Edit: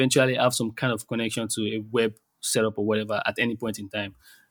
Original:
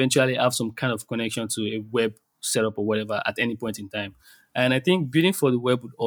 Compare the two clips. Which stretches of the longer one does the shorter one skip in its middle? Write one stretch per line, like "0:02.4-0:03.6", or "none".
none